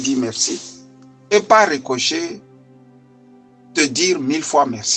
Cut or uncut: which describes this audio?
uncut